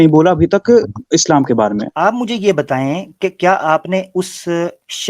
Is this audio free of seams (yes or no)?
no